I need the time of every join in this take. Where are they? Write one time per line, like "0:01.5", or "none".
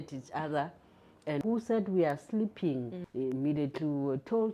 0:01.4
0:03.0